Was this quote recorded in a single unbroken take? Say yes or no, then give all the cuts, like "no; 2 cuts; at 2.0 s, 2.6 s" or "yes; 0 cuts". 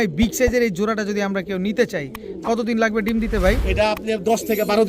yes; 0 cuts